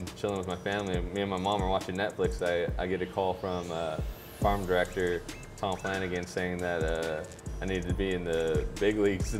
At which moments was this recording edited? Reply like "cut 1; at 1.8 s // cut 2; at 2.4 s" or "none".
none